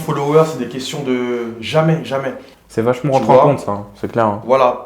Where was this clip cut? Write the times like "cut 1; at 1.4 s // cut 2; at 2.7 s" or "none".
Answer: cut 1; at 2.6 s